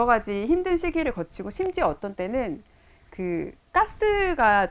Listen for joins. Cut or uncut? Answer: uncut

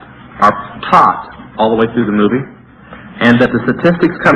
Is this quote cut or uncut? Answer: uncut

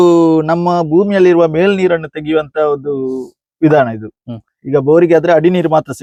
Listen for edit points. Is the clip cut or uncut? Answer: uncut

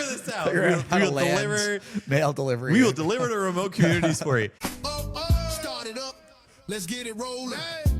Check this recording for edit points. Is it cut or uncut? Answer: cut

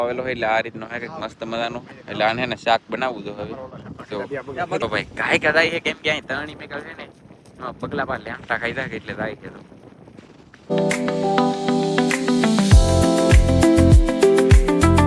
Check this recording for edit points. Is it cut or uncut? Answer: uncut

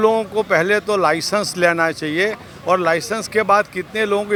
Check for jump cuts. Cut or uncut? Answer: uncut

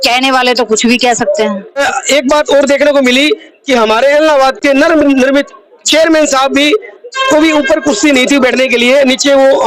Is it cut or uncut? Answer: cut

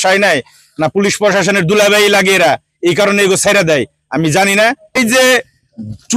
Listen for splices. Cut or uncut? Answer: cut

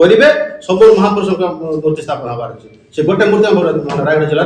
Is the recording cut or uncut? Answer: uncut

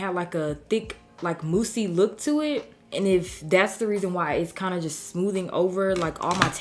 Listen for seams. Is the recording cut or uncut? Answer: uncut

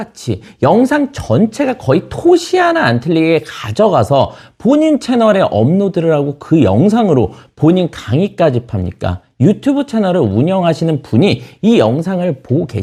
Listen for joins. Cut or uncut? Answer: uncut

